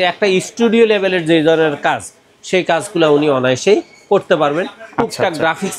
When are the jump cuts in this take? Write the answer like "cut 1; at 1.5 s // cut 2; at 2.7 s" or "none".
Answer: none